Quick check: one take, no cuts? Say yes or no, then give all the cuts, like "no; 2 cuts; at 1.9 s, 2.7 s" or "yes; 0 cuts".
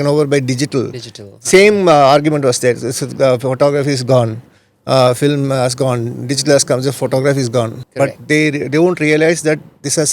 no; 1 cut; at 7.8 s